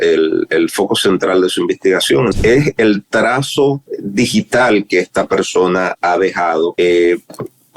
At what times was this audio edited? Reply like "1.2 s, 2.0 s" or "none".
2.4 s, 3.9 s, 6.7 s

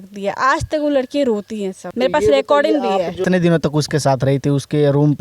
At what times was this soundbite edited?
1.8 s, 3.2 s

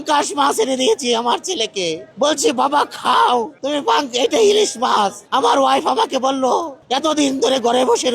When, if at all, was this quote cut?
2.0 s, 3.6 s, 5.2 s, 6.8 s

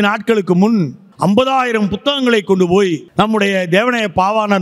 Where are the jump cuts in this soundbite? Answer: 1.0 s, 3.1 s

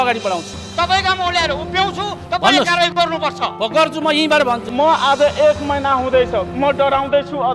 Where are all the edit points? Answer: 4.6 s

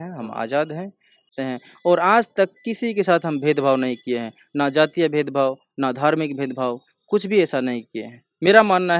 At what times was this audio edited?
1.3 s

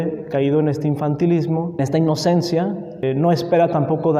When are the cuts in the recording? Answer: 1.8 s, 3.0 s

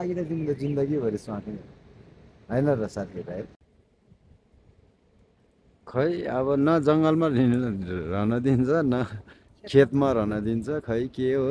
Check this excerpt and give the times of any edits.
3.5 s

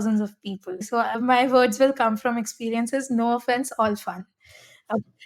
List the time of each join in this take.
none

